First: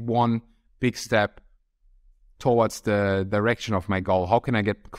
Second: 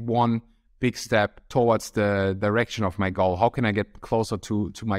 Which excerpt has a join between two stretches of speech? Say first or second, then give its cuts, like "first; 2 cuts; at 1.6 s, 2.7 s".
second; 1 cut; at 1.4 s